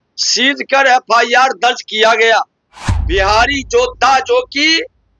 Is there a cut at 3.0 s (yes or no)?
yes